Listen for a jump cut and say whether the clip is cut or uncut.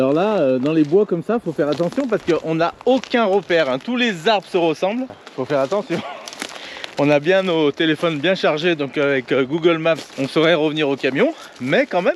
uncut